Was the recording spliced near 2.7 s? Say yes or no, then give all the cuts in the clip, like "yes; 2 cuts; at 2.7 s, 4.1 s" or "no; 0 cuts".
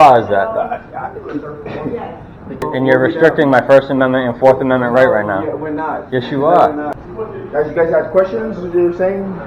yes; 2 cuts; at 2.7 s, 6.9 s